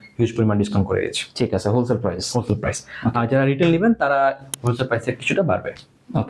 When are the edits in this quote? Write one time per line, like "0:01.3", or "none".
none